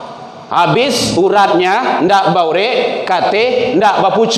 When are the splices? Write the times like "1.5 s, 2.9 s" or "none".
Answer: none